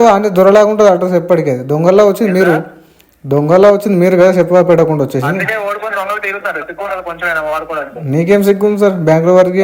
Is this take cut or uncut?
uncut